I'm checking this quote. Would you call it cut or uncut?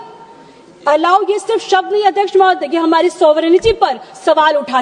uncut